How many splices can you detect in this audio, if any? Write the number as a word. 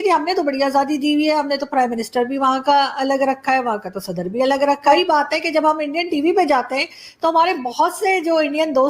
one